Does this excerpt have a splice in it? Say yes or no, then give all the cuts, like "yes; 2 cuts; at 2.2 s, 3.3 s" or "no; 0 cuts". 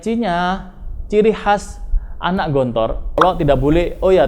yes; 1 cut; at 3.2 s